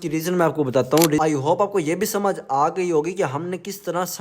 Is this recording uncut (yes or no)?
no